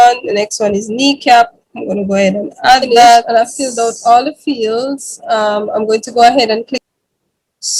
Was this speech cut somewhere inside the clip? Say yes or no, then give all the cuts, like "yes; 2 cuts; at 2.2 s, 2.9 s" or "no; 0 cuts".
yes; 2 cuts; at 3.3 s, 6.8 s